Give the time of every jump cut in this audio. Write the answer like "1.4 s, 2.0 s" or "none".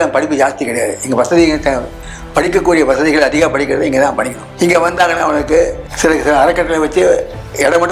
4.4 s, 5.8 s

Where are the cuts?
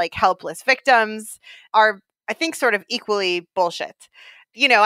1.6 s

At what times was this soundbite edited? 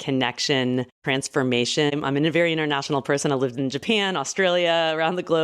1.0 s, 1.9 s

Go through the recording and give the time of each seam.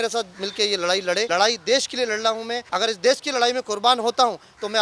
1.3 s, 2.6 s

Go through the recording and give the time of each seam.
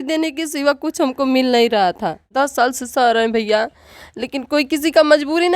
2.3 s

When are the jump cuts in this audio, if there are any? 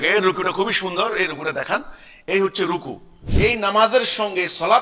3.2 s

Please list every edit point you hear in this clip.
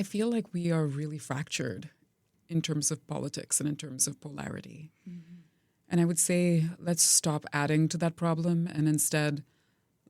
2.2 s

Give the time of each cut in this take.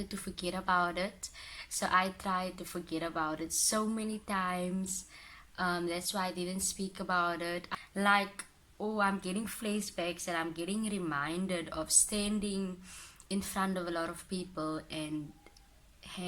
7.7 s

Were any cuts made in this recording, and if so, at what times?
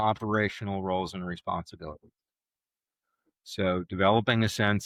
none

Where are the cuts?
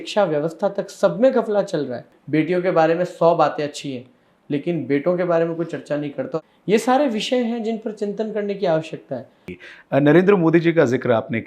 2.1 s, 6.4 s, 9.5 s

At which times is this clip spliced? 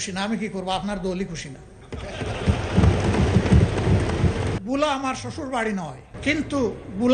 4.6 s, 6.1 s

